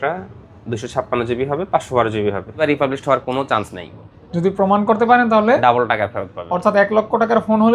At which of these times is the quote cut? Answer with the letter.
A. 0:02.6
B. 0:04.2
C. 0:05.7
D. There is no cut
A